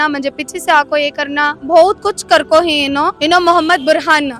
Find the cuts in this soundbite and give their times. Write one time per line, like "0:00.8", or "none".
0:01.6
0:03.1